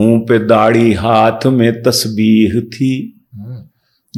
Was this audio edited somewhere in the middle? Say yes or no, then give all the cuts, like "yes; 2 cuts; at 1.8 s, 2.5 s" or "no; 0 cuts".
no; 0 cuts